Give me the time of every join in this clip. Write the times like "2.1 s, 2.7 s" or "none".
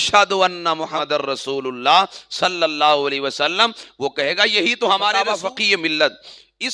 1.0 s, 5.2 s